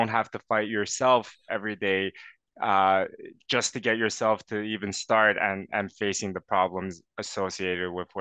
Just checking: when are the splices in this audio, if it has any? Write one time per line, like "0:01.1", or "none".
none

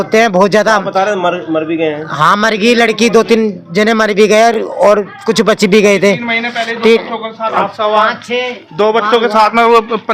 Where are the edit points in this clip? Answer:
none

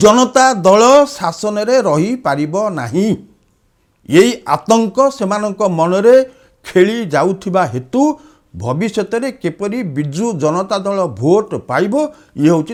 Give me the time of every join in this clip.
none

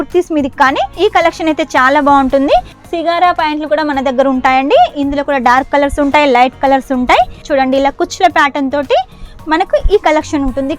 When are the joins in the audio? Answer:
0:02.8
0:07.4

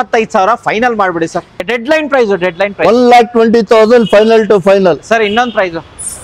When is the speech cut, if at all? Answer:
0:01.6

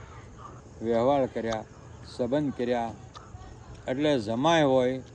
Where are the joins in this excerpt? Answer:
none

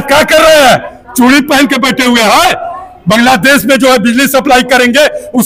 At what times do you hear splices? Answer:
none

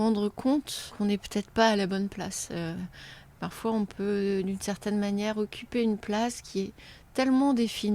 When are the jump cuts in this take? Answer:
0:00.9

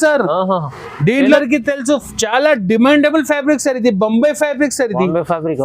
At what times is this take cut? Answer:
0:01.4

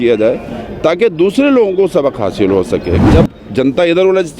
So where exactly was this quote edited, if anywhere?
0:03.0

